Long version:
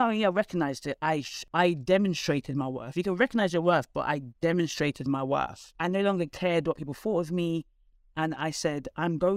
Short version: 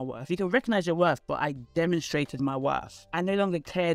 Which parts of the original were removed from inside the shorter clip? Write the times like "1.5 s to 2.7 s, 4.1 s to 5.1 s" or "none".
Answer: none